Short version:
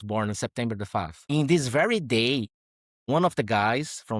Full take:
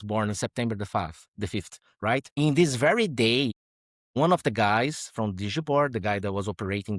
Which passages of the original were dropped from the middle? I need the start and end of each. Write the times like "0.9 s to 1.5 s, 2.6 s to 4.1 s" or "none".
1.2 s to 2.3 s